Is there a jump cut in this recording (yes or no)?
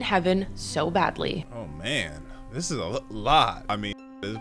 yes